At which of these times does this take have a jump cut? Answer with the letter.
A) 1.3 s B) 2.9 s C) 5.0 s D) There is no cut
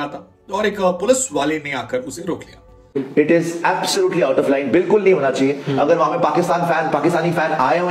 B